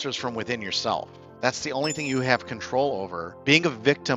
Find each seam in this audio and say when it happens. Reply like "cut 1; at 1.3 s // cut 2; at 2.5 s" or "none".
cut 1; at 3.3 s

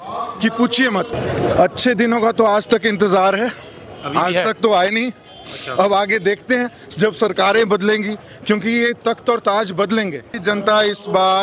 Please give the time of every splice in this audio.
cut 1; at 1.1 s // cut 2; at 10.3 s

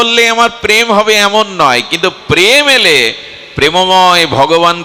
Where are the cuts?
none

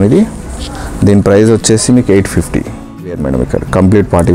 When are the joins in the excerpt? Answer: cut 1; at 3.2 s

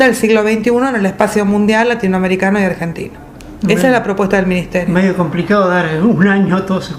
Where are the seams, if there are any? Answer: cut 1; at 3.7 s

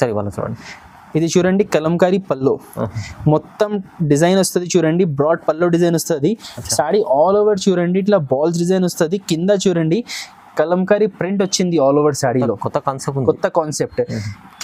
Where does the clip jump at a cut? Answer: none

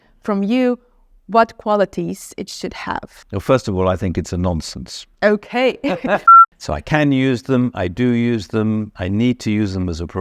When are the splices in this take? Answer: cut 1; at 6.3 s

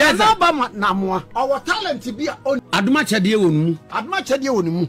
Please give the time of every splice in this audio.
cut 1; at 1.3 s // cut 2; at 2.6 s

